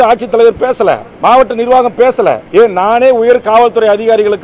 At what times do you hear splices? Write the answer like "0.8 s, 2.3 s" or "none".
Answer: 1.1 s, 2.4 s

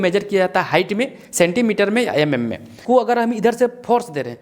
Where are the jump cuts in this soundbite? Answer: 2.7 s

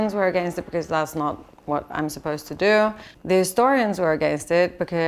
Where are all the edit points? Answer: 3.1 s

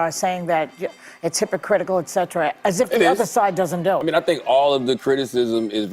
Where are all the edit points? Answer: 4.0 s

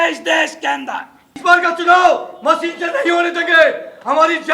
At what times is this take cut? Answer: 1.3 s

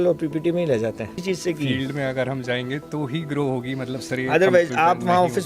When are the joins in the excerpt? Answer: 1.2 s

